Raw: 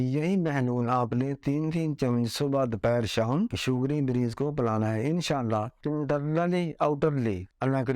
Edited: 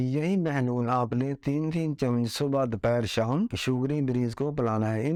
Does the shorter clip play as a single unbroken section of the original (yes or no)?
yes